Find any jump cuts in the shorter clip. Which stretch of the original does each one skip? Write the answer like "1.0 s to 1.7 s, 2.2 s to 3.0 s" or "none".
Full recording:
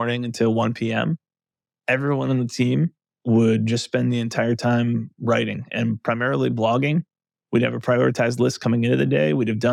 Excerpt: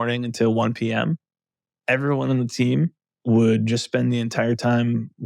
none